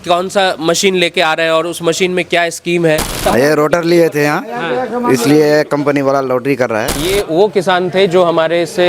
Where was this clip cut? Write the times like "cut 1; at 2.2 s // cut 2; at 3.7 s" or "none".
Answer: cut 1; at 3.1 s // cut 2; at 7.1 s